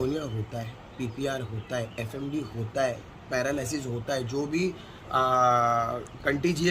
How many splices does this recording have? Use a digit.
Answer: 0